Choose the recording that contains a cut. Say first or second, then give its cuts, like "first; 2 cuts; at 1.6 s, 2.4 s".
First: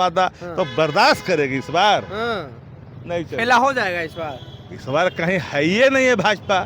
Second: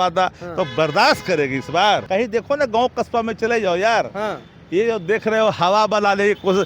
second; 1 cut; at 2.0 s